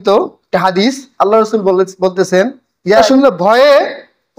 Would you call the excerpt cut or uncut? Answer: cut